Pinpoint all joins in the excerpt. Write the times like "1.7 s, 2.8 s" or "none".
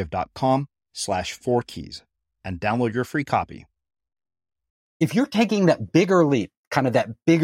4.8 s